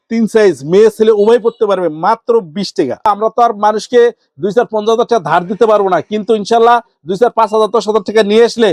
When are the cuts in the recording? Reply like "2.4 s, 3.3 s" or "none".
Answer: 3.1 s

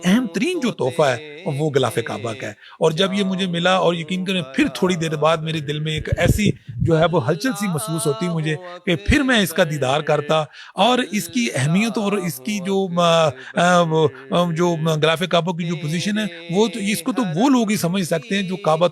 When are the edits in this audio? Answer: none

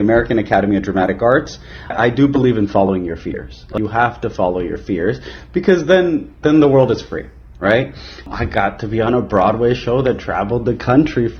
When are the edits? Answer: 1.9 s, 3.7 s, 8.3 s

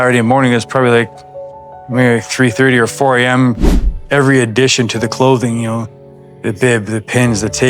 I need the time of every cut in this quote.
3.8 s

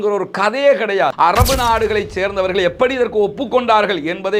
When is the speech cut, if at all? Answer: 1.1 s

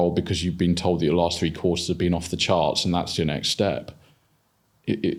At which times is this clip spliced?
none

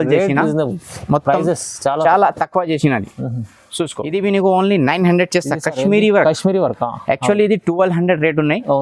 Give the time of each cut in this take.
none

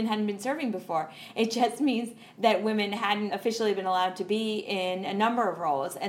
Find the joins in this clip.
3.3 s

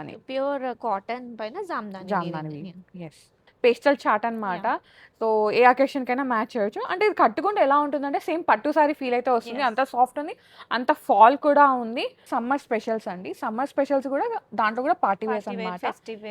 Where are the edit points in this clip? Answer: 3.4 s, 12.2 s

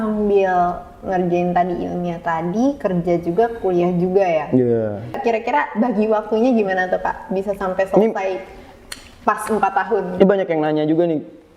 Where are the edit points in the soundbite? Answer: 5.2 s

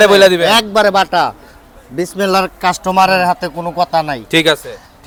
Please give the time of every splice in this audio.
none

